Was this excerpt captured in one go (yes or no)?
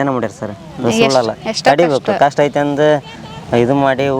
yes